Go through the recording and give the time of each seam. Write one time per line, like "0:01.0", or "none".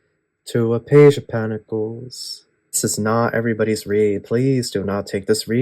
0:02.8